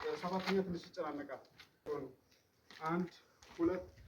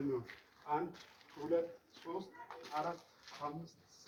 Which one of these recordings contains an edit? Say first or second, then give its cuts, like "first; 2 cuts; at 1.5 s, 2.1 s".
first; 1 cut; at 1.9 s